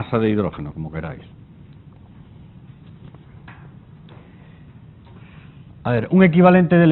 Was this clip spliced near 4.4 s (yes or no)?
yes